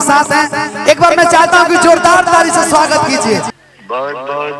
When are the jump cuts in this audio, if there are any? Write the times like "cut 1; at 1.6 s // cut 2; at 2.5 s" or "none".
cut 1; at 3.5 s